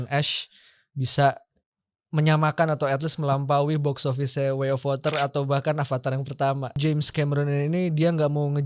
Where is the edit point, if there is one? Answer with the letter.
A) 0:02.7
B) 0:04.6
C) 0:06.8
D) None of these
C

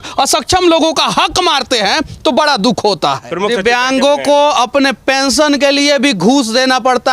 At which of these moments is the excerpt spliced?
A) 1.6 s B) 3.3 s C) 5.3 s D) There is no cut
B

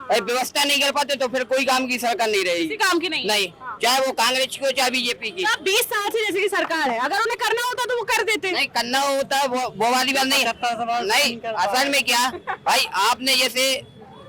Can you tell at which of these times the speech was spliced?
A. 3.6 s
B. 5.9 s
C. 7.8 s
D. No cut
D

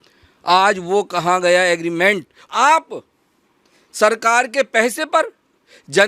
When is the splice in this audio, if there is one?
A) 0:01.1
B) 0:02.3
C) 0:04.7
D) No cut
B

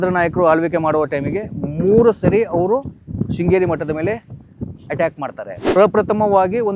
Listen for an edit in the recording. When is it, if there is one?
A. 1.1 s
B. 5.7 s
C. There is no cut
B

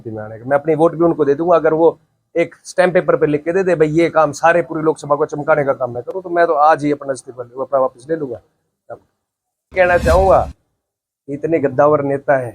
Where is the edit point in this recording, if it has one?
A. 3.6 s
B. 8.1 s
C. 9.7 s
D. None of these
C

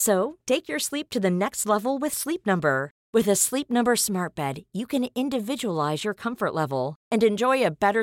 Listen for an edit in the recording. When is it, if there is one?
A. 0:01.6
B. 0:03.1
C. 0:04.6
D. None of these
D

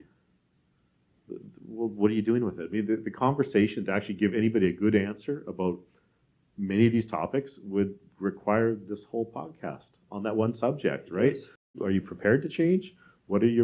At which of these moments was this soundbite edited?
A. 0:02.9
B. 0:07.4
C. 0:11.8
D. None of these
C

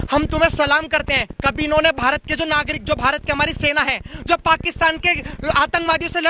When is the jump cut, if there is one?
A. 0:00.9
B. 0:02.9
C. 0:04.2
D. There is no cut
D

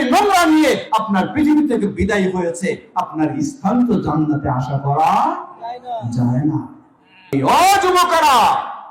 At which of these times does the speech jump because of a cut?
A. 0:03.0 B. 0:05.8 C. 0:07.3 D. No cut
C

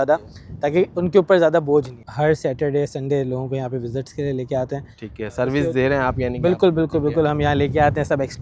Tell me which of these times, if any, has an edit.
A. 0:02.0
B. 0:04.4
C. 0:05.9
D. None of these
A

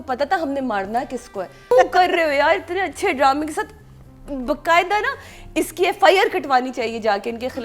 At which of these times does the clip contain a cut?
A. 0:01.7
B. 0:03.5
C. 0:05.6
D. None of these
A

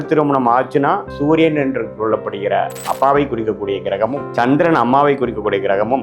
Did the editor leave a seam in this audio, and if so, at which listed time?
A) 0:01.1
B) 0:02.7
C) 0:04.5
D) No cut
A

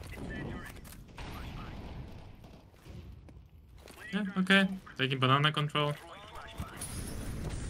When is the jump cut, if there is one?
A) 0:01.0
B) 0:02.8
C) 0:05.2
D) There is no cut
D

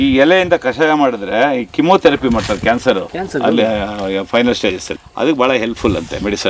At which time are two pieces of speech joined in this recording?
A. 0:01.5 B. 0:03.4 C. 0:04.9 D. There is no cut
C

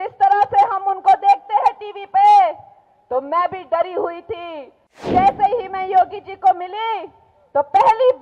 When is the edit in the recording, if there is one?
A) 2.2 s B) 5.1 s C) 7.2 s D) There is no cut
B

